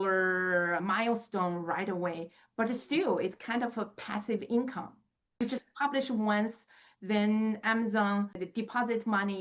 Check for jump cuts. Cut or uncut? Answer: cut